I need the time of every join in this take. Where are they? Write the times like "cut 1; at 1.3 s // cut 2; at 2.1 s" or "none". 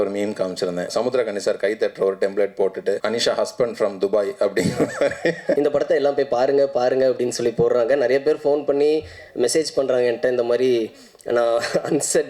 cut 1; at 0.9 s // cut 2; at 3.0 s // cut 3; at 5.5 s